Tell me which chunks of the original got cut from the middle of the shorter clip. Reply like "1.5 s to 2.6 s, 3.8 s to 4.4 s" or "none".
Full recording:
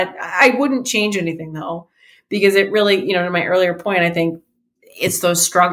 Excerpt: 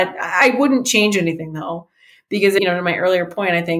2.6 s to 3.1 s